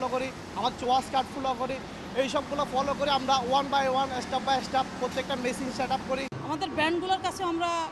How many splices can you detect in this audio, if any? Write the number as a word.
one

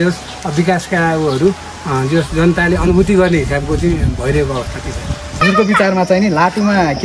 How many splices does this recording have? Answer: one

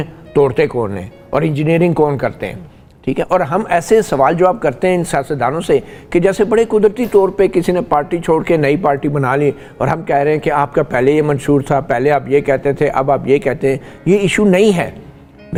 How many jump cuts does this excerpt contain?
zero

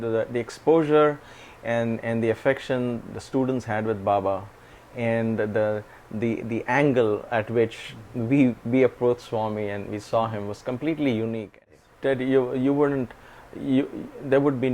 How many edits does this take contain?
one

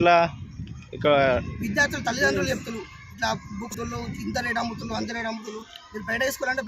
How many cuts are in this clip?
one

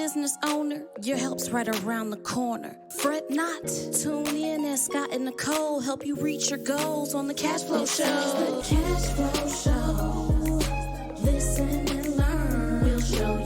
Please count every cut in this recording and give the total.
one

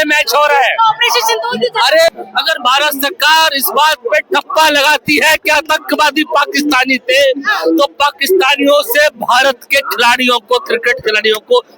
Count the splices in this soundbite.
one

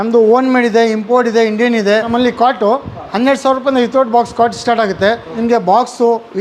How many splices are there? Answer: two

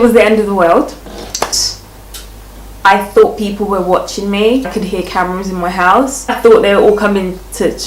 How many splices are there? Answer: three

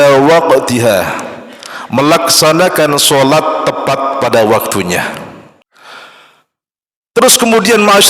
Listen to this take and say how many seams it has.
one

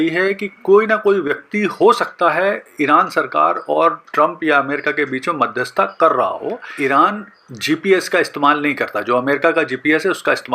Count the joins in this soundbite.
one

